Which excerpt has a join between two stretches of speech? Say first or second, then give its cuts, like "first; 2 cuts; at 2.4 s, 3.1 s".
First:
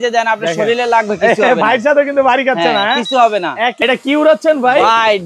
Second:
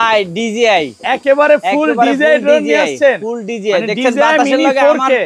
first; 1 cut; at 3.8 s